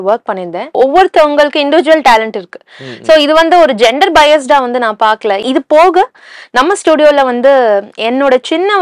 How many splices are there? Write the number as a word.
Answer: two